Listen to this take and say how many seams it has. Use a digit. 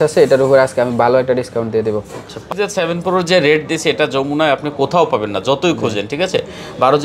1